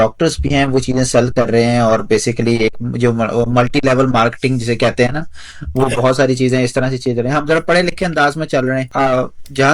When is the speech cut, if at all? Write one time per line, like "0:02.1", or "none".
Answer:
none